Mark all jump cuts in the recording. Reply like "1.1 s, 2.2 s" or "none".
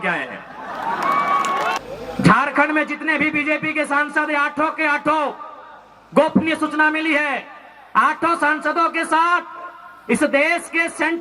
1.8 s